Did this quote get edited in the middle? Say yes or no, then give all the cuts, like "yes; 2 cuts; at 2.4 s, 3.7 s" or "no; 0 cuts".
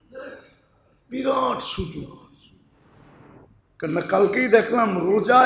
yes; 1 cut; at 2.8 s